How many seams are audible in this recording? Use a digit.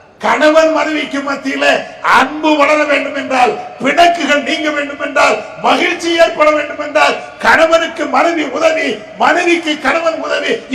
0